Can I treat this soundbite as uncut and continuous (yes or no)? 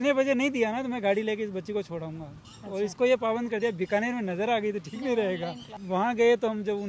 yes